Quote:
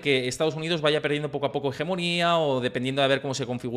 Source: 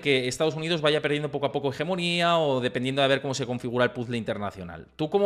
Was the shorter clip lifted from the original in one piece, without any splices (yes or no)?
yes